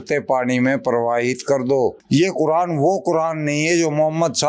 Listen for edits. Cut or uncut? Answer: cut